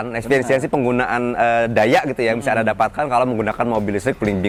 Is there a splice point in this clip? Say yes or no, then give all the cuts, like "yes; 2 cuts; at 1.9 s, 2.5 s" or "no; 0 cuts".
no; 0 cuts